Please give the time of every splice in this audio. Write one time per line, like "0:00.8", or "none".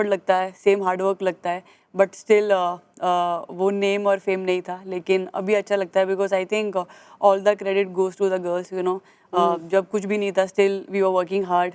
none